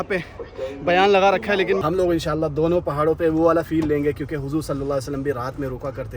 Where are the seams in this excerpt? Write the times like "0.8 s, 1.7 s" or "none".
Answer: 1.8 s